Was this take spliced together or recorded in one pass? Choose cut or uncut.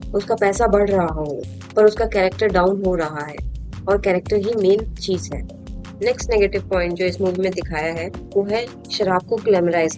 uncut